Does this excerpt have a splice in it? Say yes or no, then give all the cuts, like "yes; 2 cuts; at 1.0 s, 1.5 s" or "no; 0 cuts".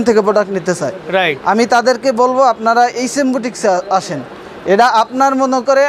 no; 0 cuts